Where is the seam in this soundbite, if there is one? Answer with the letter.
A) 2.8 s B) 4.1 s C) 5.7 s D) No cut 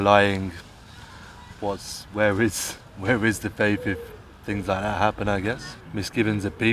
C